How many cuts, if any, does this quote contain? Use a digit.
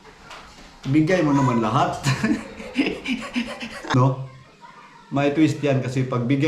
1